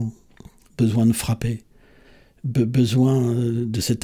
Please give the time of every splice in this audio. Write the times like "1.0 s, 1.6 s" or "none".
none

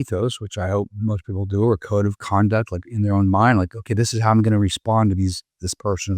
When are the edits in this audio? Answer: none

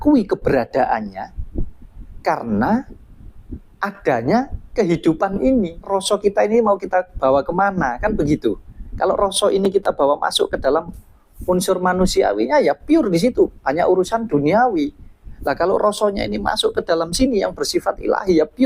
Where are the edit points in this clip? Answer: 5.9 s

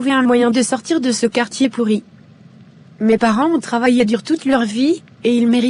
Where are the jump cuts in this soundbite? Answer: none

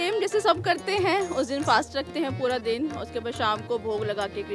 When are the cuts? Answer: none

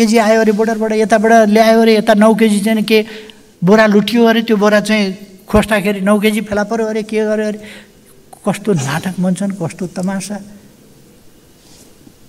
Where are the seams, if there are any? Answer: none

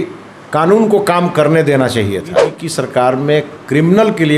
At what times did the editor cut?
2.6 s

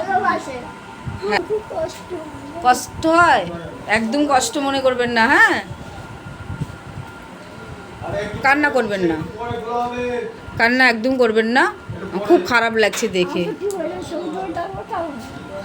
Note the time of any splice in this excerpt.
1.4 s

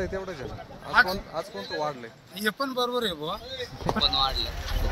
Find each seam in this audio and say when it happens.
4.0 s

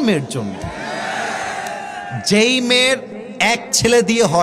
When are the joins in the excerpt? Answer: none

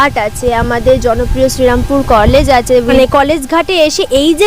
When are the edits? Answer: 2.9 s

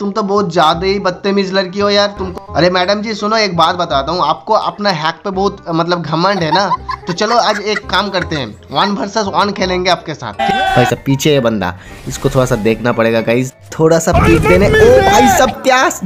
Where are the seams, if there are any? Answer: 2.2 s, 10.7 s

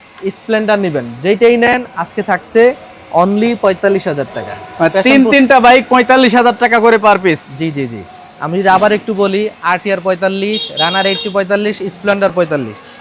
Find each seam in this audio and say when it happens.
none

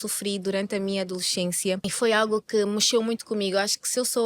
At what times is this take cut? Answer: 1.9 s

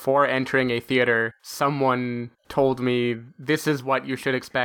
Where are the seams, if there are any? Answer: 1.4 s, 2.4 s

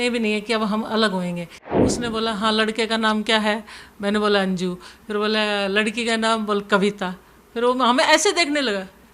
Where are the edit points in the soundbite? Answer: 1.9 s

